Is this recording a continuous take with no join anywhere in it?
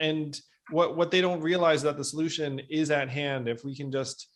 yes; 0 cuts

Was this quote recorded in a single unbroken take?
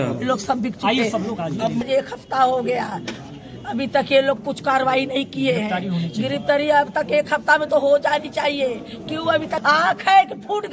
no; 2 cuts; at 1.8 s, 9.6 s

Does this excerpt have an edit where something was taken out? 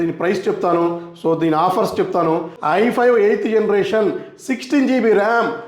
yes; 1 cut; at 2.5 s

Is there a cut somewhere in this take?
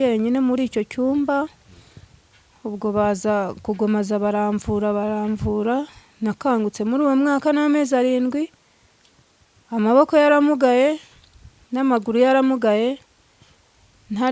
no; 0 cuts

